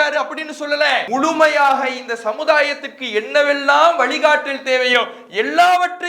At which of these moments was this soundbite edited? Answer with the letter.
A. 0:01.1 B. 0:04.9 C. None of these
A